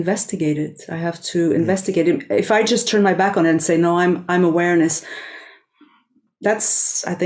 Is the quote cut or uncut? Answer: uncut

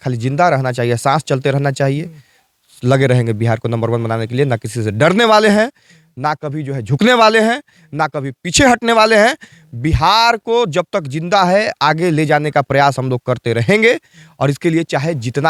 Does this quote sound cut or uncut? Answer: uncut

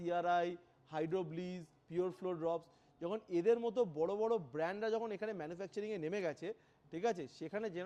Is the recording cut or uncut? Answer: uncut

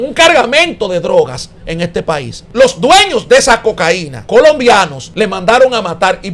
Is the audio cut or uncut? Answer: cut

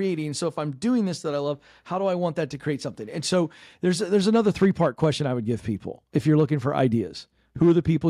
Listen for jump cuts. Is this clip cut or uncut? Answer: uncut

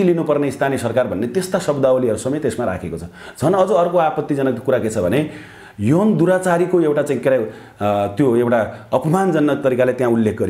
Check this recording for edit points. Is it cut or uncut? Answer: uncut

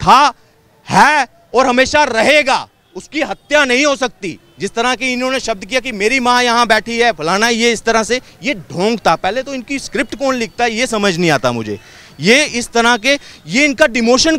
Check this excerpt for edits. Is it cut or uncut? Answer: uncut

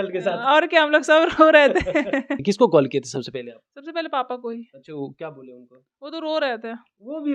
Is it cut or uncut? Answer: cut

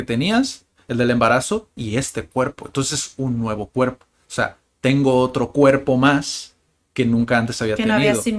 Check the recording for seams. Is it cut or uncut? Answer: uncut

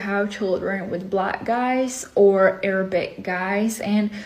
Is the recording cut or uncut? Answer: uncut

